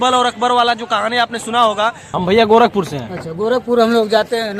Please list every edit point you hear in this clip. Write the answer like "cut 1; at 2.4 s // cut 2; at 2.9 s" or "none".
cut 1; at 2.0 s